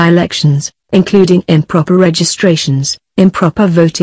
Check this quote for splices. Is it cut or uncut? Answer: uncut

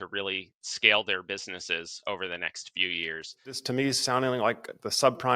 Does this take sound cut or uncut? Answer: cut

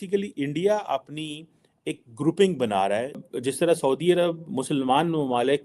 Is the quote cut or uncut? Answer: cut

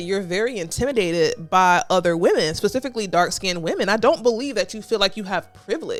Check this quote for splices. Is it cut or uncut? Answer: uncut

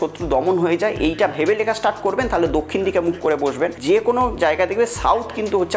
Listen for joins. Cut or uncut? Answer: cut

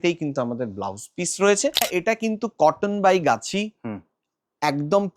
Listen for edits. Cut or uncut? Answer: cut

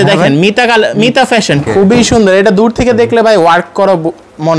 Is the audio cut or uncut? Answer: cut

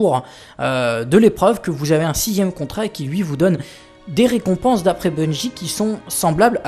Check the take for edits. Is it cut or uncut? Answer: uncut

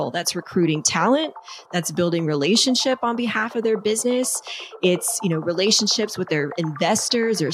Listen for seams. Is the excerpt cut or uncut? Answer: uncut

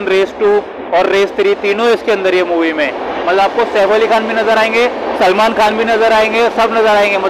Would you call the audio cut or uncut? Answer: uncut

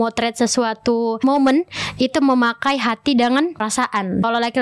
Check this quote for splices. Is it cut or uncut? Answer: cut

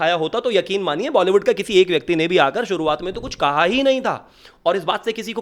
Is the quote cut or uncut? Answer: uncut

